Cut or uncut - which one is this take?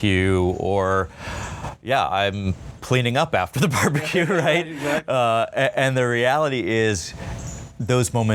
uncut